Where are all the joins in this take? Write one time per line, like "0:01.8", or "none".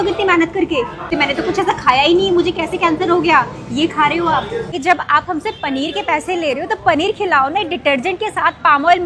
0:01.1
0:04.7